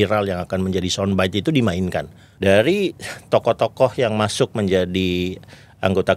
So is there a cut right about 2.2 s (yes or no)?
yes